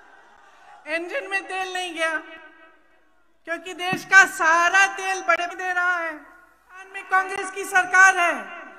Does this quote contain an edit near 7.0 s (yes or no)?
yes